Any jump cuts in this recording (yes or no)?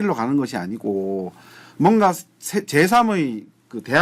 no